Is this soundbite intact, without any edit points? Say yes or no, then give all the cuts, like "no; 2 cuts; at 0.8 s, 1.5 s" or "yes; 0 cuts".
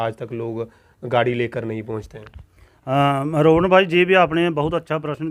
yes; 0 cuts